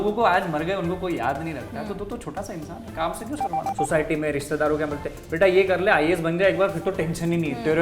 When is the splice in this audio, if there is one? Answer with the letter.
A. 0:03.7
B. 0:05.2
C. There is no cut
A